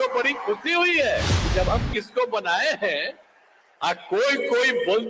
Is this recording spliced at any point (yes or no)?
yes